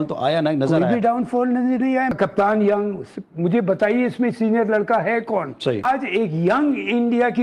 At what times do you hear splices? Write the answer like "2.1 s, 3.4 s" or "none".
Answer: 5.8 s